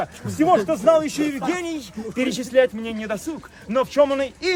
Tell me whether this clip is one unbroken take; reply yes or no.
yes